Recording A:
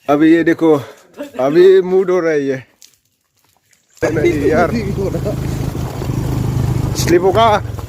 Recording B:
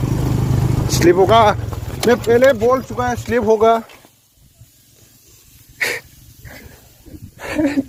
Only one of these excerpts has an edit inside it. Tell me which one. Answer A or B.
A